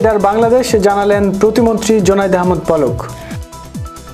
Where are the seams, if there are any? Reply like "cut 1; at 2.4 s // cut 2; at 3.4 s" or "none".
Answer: cut 1; at 3.1 s